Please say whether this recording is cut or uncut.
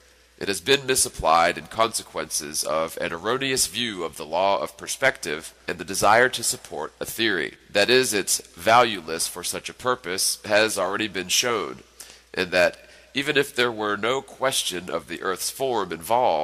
uncut